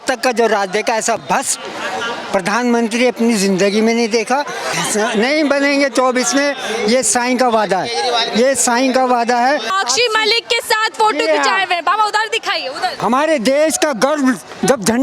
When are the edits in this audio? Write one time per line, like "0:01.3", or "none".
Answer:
0:04.8
0:09.7
0:13.0